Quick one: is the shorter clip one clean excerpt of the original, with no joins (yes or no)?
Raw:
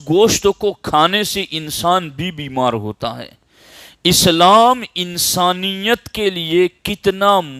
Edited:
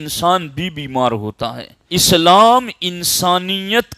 no